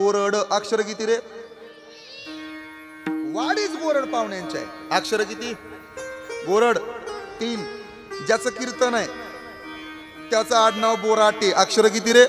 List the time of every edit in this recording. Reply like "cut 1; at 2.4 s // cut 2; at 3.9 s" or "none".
none